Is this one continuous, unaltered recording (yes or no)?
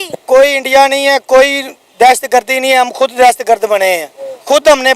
yes